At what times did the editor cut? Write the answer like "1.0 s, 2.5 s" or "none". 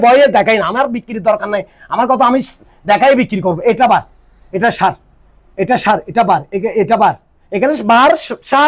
none